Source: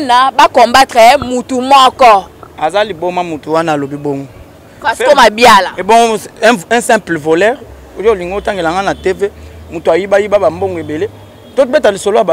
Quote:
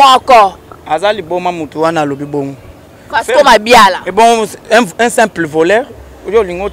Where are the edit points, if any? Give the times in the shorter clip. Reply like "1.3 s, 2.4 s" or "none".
none